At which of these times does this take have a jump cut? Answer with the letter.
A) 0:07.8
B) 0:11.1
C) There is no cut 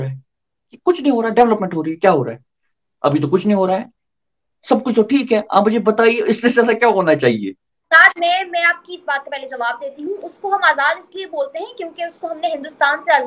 A